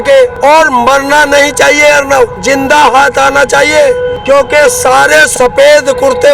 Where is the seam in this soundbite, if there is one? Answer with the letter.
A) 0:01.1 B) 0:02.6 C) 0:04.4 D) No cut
D